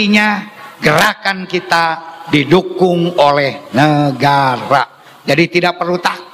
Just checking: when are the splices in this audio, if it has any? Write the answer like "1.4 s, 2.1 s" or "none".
none